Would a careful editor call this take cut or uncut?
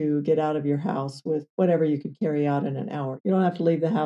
cut